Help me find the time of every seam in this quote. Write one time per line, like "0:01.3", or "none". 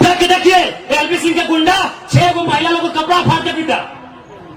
none

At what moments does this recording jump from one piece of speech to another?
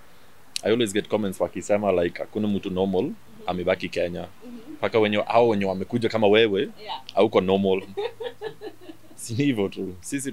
none

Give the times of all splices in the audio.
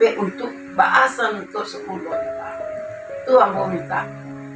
none

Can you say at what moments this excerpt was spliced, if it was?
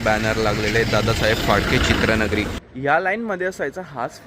0:02.6

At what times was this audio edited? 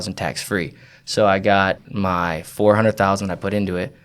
0:01.8

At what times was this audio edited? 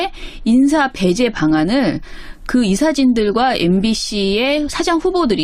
0:03.6

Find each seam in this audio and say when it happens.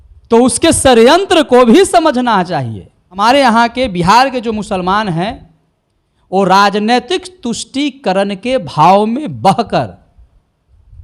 0:03.2

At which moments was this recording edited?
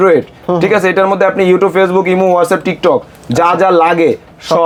none

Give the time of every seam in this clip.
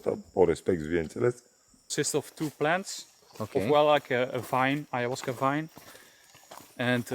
0:01.8

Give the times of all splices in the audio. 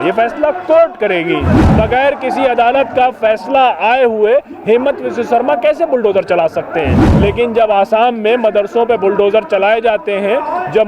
0:01.6
0:07.0

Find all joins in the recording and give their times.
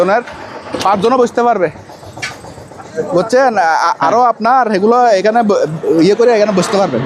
none

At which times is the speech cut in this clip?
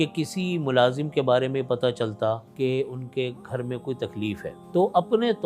0:02.5
0:04.5

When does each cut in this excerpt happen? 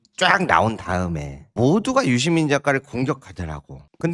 none

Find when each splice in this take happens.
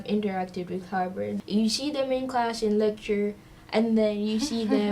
0:01.3

